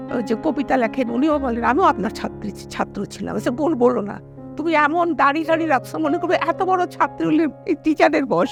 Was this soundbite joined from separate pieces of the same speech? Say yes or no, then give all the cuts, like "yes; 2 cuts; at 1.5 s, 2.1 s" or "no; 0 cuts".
no; 0 cuts